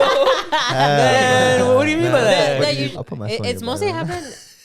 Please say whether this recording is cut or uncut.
cut